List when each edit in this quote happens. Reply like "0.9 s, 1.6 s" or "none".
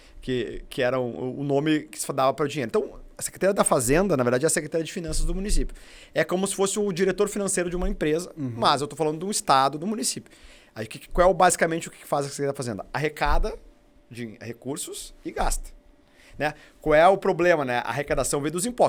none